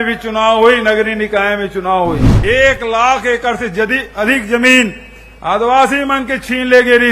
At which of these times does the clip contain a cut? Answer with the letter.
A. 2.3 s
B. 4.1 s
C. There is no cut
A